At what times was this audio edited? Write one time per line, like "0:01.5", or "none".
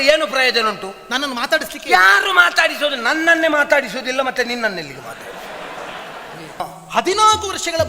0:06.6